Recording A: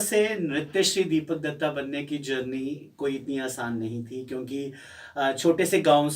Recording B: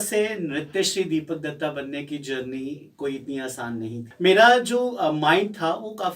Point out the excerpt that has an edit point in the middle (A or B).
B